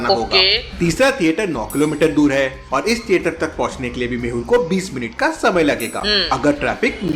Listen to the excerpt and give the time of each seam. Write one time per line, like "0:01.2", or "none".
0:05.4
0:06.3